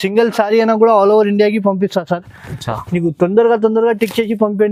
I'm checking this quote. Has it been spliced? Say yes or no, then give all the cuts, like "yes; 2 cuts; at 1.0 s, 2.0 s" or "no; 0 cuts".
no; 0 cuts